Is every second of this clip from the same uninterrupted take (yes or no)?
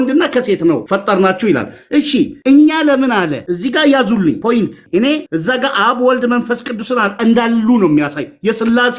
no